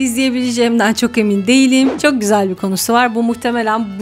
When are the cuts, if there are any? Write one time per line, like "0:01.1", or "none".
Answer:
0:01.9